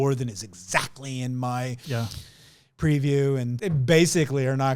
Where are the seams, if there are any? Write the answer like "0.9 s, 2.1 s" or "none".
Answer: 3.5 s